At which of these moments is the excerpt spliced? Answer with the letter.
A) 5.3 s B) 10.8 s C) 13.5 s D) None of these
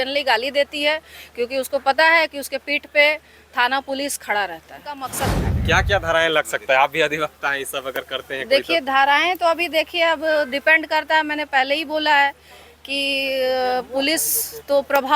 A